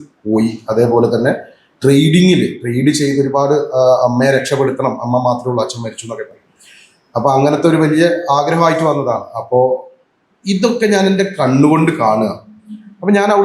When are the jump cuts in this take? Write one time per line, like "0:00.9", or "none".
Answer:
none